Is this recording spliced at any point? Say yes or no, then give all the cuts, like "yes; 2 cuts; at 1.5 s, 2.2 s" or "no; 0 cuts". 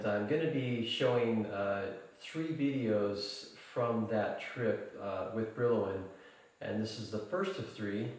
no; 0 cuts